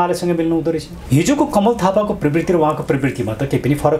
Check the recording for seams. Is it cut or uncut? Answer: cut